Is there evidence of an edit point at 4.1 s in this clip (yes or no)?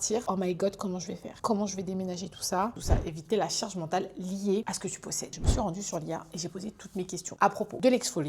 no